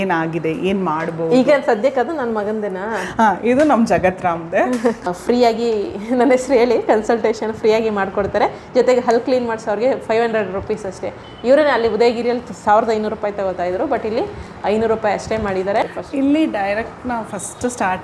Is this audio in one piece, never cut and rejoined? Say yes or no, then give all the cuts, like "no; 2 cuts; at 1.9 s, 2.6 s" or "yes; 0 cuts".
no; 2 cuts; at 5.0 s, 16.0 s